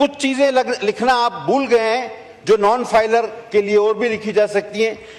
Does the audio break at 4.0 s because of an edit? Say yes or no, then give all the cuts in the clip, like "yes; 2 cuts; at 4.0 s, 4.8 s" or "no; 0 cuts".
no; 0 cuts